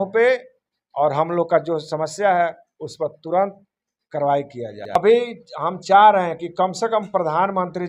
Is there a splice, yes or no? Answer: yes